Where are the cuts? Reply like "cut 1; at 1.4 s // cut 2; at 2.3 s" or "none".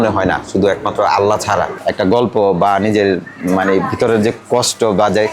cut 1; at 1.8 s